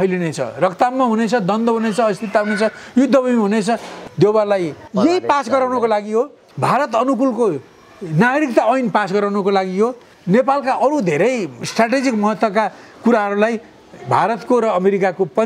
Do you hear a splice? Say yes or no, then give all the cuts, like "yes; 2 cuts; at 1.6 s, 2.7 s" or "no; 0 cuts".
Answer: yes; 4 cuts; at 4.0 s, 4.8 s, 6.4 s, 11.6 s